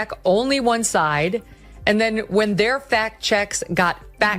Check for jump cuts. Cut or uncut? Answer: uncut